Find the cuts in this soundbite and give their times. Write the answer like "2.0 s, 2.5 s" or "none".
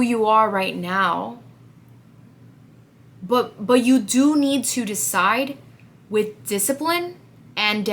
none

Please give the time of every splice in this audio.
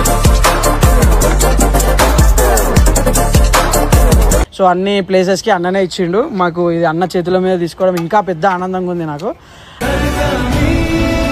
none

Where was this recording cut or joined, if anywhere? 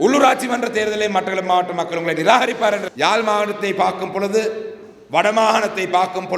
2.9 s

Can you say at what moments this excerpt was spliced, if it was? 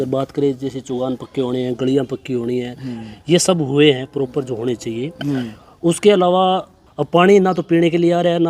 6.8 s

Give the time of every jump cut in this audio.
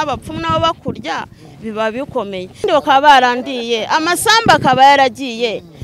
2.6 s

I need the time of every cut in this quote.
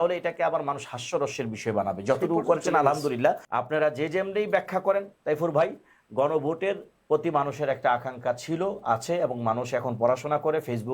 3.5 s

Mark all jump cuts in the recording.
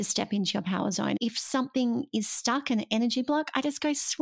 1.2 s

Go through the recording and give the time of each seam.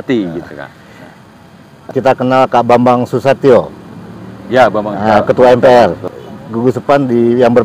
1.9 s, 6.1 s

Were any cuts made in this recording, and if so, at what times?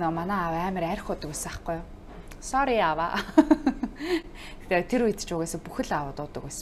none

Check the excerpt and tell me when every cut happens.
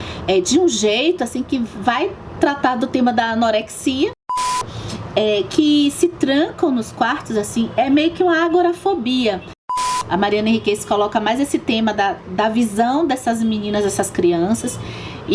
4.7 s, 9.8 s

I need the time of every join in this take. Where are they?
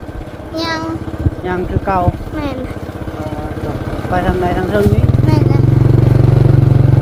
none

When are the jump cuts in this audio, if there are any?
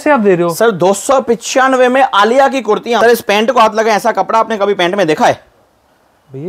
3.0 s

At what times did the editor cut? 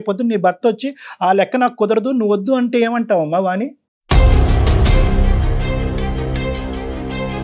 none

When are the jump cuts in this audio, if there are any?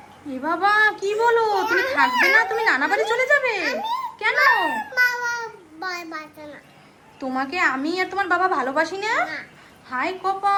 none

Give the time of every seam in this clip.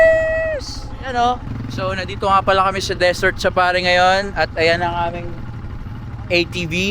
1.6 s

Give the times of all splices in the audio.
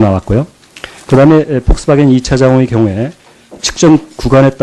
3.2 s

